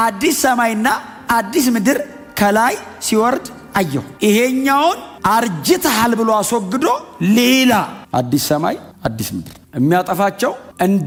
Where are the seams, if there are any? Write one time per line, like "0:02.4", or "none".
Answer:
none

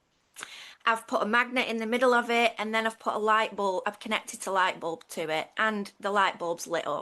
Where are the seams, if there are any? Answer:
none

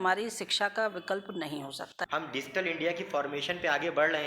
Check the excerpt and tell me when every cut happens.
0:01.9

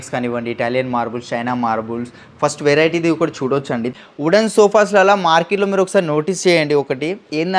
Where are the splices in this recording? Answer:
0:04.0

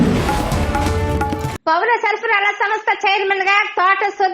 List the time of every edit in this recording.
0:01.5

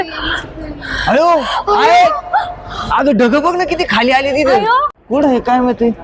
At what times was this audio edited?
0:04.9

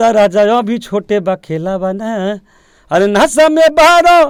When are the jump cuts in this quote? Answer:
none

